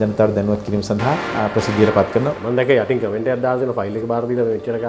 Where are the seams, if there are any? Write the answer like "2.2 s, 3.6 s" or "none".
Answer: 2.4 s